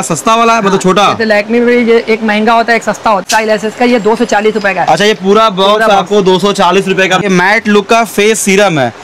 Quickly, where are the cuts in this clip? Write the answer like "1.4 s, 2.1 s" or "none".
3.2 s, 7.2 s